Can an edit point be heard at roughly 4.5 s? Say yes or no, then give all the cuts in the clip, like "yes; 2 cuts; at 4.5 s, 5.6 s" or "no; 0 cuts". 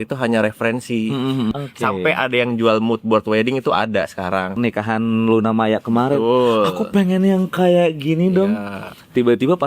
yes; 2 cuts; at 1.5 s, 4.5 s